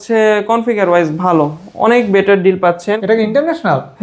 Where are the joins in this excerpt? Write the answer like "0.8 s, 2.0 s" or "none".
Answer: 3.0 s